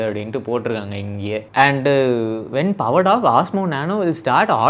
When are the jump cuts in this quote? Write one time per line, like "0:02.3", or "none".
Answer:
0:01.5